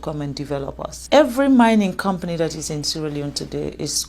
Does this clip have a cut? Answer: yes; 1 cut; at 1.0 s

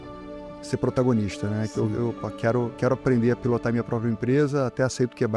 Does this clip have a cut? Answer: no; 0 cuts

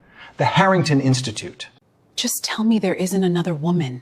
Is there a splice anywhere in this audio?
yes; 1 cut; at 1.7 s

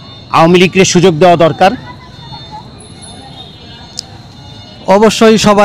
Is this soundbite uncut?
yes; 0 cuts

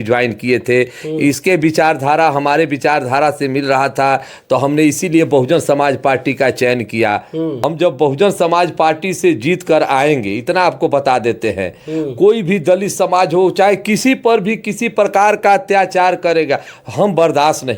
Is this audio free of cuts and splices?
no; 1 cut; at 7.6 s

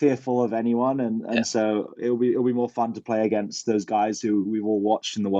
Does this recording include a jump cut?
no; 0 cuts

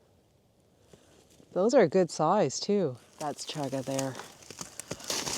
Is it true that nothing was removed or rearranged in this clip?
no; 1 cut; at 3.4 s

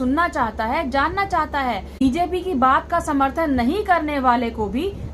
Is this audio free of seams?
no; 1 cut; at 2.0 s

